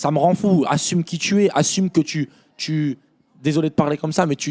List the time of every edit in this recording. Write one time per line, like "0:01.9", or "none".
none